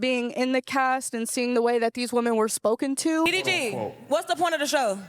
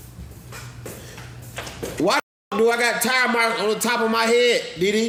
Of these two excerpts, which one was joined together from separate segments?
first; 1 cut; at 3.3 s

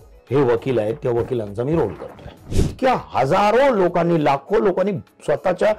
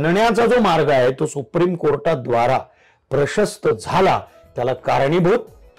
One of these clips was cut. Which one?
first; 1 cut; at 2.6 s

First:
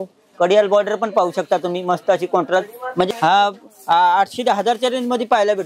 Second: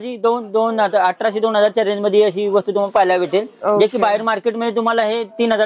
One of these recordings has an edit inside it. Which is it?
first; 1 cut; at 3.1 s

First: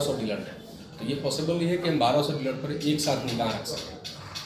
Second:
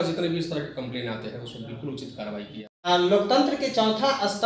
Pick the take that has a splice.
second; 1 cut; at 2.9 s

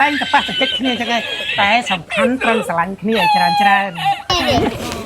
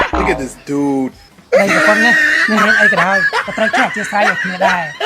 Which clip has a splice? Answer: second; 1 cut; at 1.3 s

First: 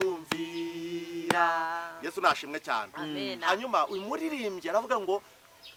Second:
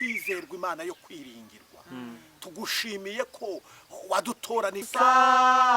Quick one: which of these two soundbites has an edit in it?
second; 1 cut; at 4.9 s

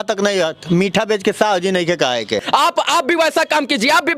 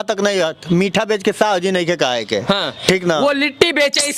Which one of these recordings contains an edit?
first; 1 cut; at 2.4 s

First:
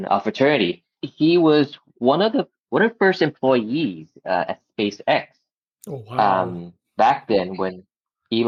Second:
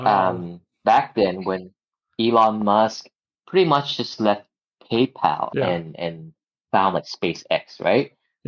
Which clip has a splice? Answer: second; 1 cut; at 5.5 s

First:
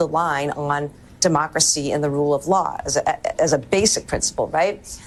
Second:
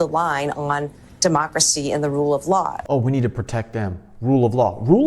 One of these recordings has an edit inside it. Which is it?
second; 1 cut; at 2.8 s

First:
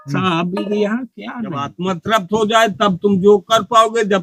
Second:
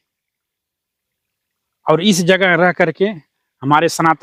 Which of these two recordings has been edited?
first; 1 cut; at 1.7 s

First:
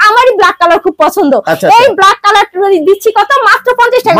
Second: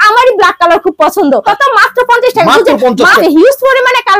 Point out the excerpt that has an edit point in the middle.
second; 2 cuts; at 1.5 s, 3.2 s

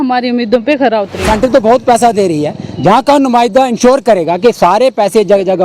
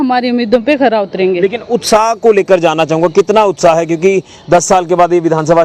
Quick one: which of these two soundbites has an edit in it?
first; 1 cut; at 1.2 s

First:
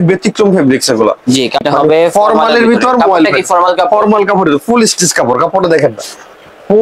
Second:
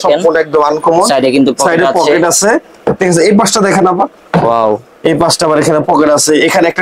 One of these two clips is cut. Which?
first; 1 cut; at 1.6 s

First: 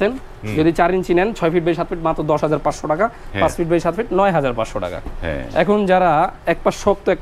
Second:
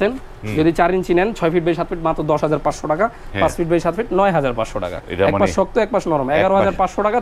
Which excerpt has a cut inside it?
second; 1 cut; at 5.0 s

